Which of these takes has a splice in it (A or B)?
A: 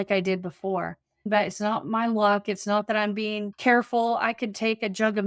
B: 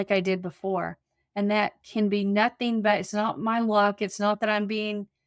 A